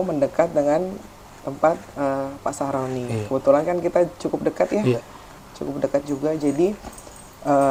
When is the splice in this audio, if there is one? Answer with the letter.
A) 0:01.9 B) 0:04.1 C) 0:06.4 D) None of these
D